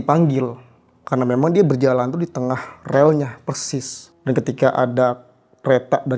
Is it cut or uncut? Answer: uncut